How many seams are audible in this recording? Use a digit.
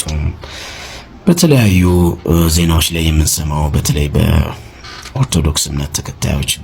0